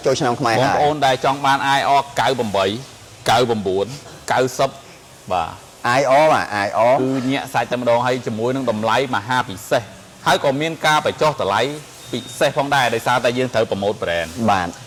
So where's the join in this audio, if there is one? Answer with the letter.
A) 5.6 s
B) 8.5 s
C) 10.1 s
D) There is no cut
D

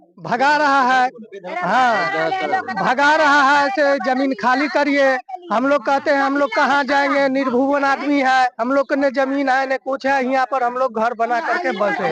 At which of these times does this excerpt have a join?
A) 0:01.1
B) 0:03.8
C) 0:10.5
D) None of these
D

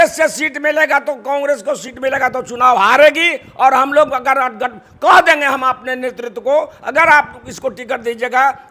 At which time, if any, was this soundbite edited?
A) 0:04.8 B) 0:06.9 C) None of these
C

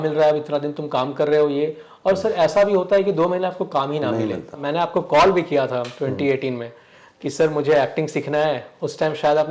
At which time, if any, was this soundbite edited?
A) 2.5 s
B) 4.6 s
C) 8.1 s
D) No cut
B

